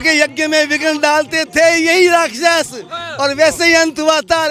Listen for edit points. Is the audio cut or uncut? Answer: uncut